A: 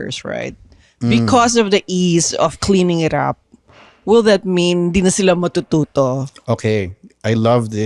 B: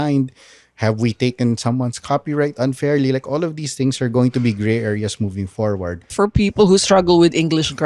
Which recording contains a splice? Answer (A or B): B